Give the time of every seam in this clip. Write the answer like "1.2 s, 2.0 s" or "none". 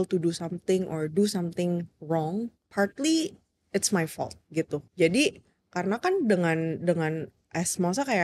2.6 s, 4.8 s